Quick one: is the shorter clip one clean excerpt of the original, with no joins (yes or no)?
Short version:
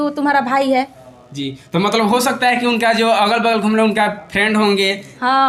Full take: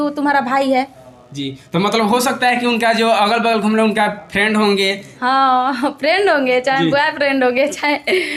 yes